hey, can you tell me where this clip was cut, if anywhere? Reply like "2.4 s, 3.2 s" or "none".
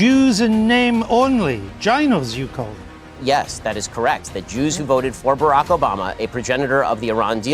3.1 s